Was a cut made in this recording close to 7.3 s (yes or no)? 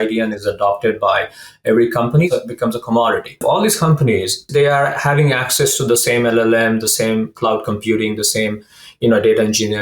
no